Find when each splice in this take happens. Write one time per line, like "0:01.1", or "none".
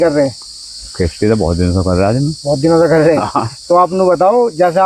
none